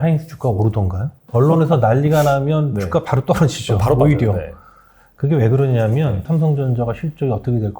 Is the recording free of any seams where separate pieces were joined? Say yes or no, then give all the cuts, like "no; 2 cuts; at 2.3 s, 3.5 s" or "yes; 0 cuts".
no; 2 cuts; at 1.2 s, 6.2 s